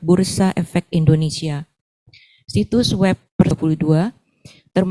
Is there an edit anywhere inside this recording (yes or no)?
yes